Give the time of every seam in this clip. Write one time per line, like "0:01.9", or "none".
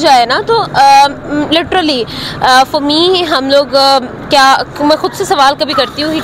none